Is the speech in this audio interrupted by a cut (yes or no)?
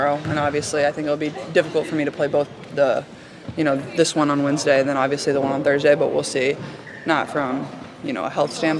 yes